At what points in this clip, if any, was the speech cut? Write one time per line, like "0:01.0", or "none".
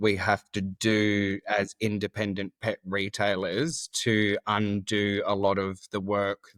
none